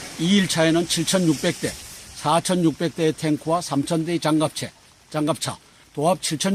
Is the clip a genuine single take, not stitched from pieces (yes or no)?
yes